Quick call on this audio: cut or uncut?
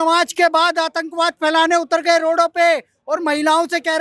uncut